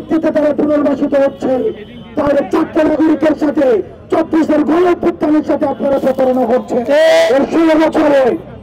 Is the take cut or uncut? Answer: cut